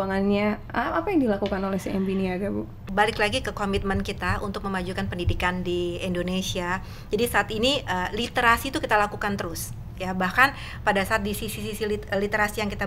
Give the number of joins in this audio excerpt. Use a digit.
1